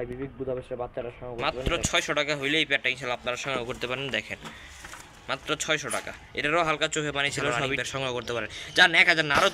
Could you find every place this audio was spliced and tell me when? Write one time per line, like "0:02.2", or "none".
0:01.4
0:07.8